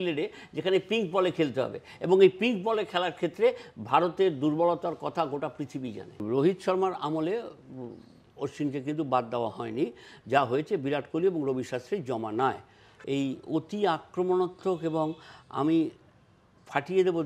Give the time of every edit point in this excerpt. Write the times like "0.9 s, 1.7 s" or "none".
6.2 s, 12.9 s